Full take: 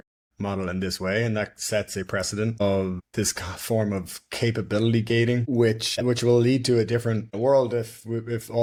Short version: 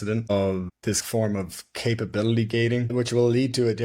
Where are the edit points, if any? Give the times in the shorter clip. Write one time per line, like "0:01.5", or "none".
0:01.0
0:02.9